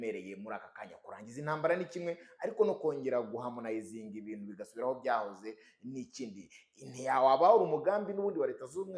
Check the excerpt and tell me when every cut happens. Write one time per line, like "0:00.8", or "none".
none